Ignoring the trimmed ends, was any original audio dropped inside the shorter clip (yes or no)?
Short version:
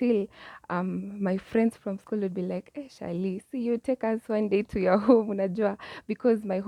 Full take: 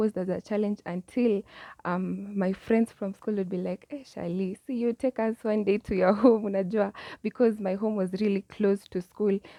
no